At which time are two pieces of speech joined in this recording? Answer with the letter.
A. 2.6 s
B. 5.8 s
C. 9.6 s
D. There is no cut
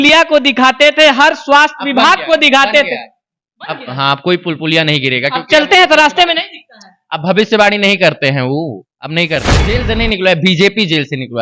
C